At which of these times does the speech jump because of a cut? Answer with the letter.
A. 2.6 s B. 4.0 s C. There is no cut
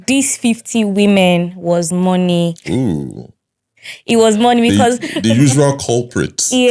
C